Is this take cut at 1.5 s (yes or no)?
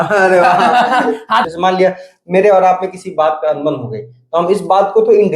yes